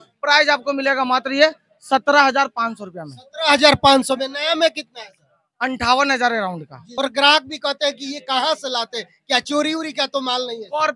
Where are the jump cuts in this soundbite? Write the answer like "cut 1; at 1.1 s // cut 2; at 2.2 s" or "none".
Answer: cut 1; at 6.8 s